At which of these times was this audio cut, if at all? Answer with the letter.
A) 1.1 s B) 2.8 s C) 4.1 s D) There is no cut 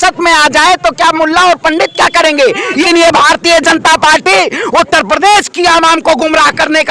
B